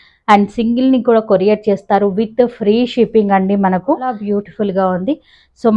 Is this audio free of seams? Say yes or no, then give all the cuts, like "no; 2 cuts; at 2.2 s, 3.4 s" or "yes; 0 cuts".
no; 1 cut; at 4.2 s